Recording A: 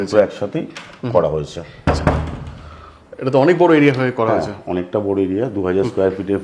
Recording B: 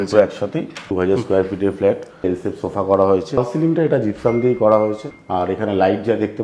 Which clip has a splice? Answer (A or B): B